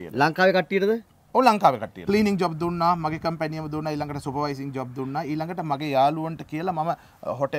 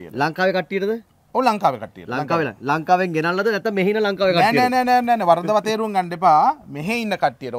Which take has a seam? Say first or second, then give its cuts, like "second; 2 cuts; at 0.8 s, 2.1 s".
first; 1 cut; at 2.0 s